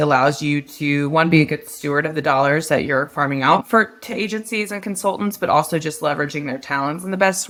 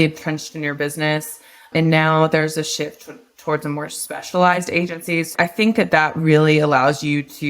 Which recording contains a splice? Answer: second; 1 cut; at 5.3 s

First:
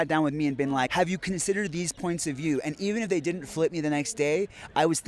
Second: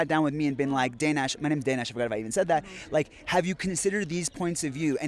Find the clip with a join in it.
first; 1 cut; at 0.9 s

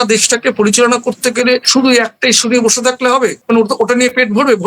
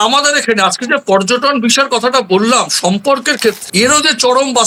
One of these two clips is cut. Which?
first; 2 cuts; at 1.7 s, 3.4 s

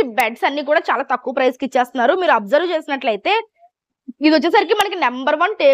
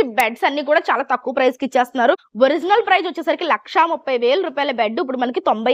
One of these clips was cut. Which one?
second; 1 cut; at 2.2 s

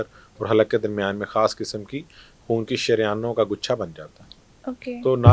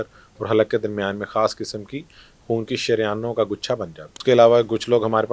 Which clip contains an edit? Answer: second; 1 cut; at 4.1 s

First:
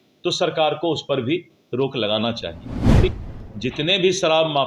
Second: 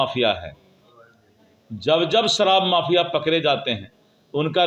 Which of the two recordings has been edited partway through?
first; 1 cut; at 3.1 s

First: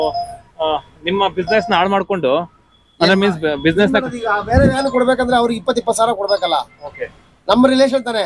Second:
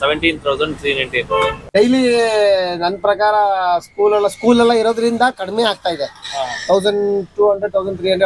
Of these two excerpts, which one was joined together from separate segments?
second; 1 cut; at 1.6 s

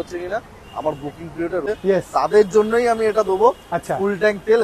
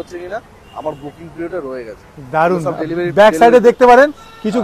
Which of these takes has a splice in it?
first; 1 cut; at 1.6 s

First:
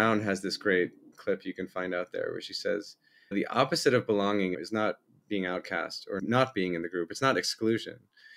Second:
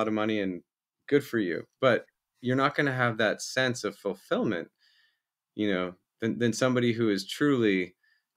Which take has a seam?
first; 4 cuts; at 1.2 s, 3.3 s, 4.5 s, 6.2 s

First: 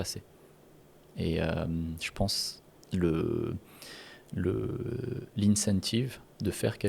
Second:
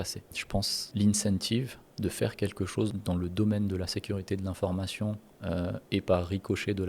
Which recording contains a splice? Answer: second; 2 cuts; at 0.8 s, 2.9 s

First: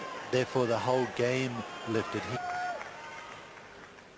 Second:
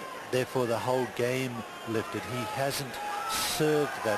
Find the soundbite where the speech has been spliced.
second; 1 cut; at 2.3 s

